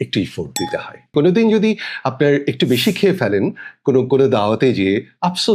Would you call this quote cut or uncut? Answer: cut